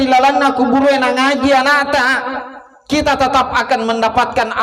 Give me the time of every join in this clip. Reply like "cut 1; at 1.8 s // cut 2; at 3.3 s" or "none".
none

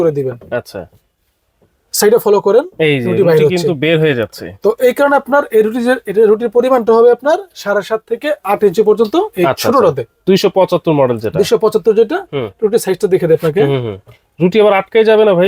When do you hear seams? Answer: none

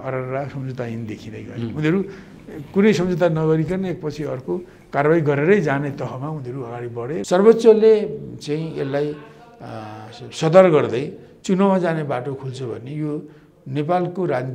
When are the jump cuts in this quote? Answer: cut 1; at 7.1 s

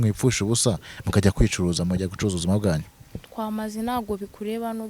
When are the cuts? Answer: none

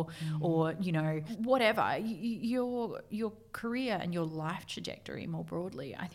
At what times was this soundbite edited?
cut 1; at 1.3 s

